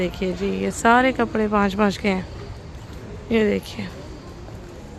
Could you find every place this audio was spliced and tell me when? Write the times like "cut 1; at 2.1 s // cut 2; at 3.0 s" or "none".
none